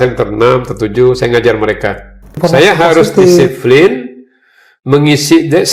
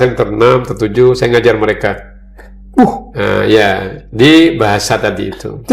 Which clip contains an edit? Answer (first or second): first